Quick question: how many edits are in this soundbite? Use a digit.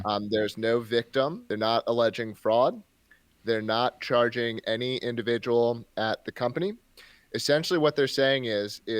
1